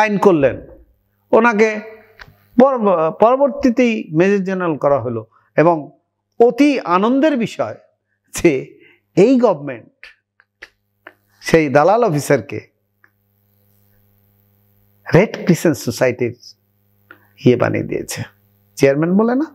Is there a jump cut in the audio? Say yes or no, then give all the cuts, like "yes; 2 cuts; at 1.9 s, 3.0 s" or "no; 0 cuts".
no; 0 cuts